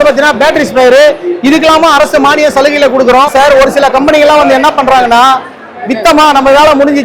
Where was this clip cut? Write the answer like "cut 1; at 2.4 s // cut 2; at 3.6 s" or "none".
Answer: cut 1; at 3.3 s

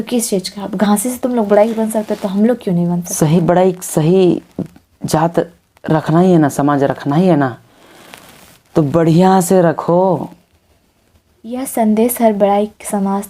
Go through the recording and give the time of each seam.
cut 1; at 11.6 s

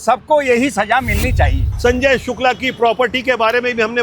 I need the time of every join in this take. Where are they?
cut 1; at 1.7 s

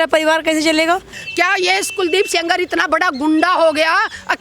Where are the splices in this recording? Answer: cut 1; at 1.2 s

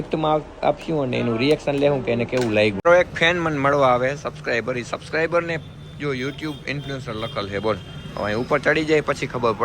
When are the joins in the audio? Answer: cut 1; at 2.8 s

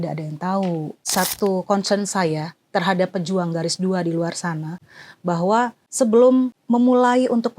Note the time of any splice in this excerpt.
cut 1; at 1.0 s // cut 2; at 5.8 s // cut 3; at 6.6 s

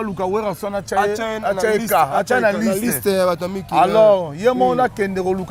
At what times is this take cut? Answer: none

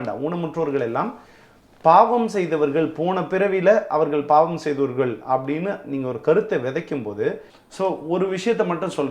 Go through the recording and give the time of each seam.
cut 1; at 7.5 s

